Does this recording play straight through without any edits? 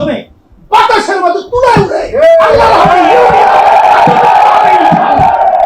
yes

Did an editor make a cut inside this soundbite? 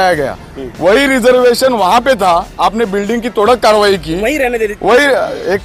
no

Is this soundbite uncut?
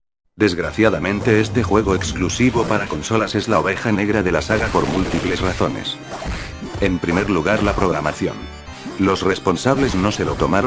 no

